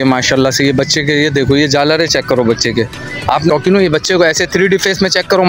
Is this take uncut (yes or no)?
no